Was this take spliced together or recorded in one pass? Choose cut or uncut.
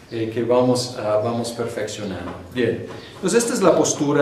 cut